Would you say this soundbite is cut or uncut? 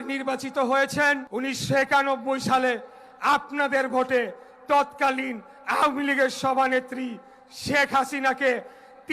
cut